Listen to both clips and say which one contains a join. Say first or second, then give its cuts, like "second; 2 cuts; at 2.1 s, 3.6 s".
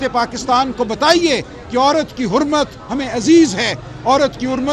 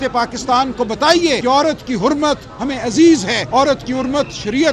second; 2 cuts; at 1.4 s, 3.4 s